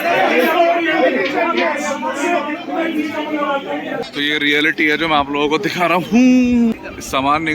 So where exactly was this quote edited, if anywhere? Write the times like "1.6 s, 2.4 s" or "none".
4.0 s, 6.6 s